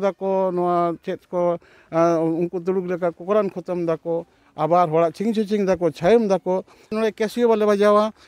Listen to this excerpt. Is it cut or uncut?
cut